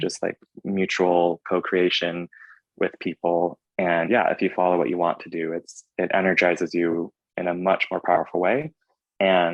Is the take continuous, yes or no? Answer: no